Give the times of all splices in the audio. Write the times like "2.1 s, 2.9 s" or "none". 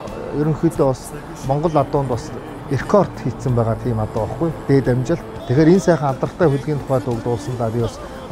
5.3 s